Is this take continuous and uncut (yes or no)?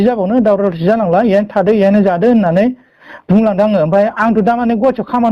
yes